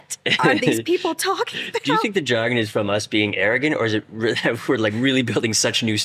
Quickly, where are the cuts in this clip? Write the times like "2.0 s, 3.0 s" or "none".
none